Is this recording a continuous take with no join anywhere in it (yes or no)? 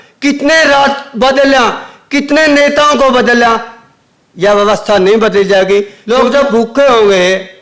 no